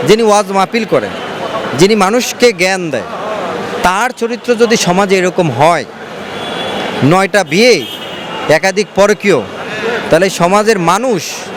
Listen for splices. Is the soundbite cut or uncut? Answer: uncut